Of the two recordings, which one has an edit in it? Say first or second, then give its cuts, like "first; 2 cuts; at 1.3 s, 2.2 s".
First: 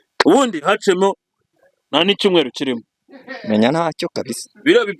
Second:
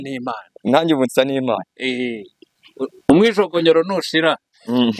second; 1 cut; at 2.5 s